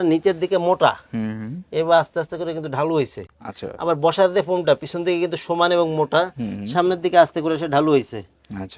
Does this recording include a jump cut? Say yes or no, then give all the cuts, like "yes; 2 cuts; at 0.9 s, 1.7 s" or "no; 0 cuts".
no; 0 cuts